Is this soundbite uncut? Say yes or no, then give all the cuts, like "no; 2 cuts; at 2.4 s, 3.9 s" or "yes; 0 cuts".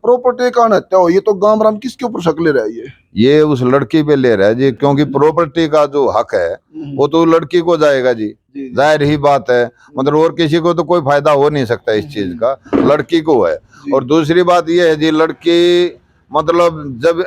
yes; 0 cuts